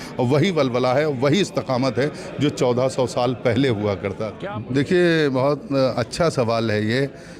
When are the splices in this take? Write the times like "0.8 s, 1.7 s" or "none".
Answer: 4.3 s